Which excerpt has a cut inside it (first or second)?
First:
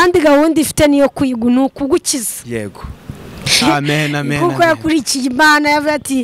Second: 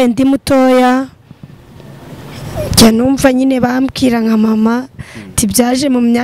first